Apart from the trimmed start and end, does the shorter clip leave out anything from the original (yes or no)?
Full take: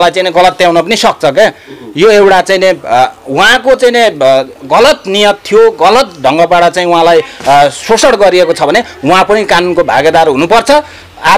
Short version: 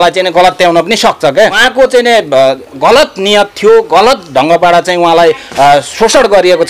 yes